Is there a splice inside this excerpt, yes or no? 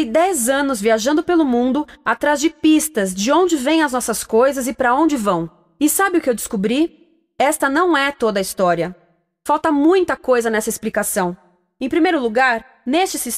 no